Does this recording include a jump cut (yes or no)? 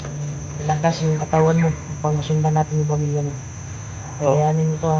no